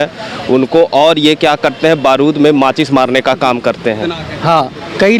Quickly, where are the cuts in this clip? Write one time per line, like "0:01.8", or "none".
0:04.1